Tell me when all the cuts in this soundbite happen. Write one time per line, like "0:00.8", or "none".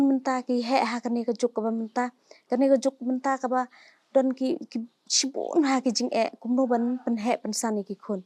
none